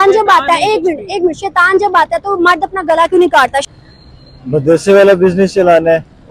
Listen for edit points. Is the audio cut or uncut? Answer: cut